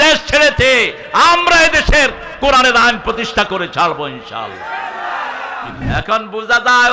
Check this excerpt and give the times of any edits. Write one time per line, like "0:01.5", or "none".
0:05.8